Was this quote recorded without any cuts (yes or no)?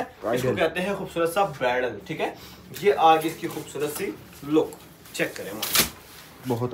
yes